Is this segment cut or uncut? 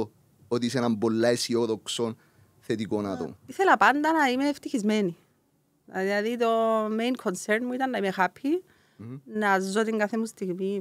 cut